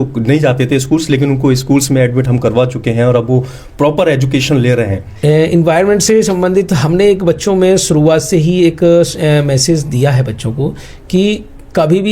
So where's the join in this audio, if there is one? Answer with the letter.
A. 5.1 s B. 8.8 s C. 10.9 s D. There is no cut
A